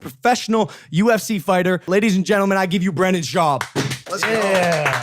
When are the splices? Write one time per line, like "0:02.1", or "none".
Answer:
0:01.9